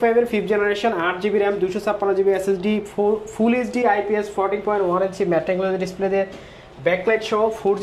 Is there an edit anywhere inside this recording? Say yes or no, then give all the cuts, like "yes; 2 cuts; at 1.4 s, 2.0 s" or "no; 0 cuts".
no; 0 cuts